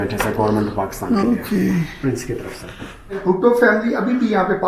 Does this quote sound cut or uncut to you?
cut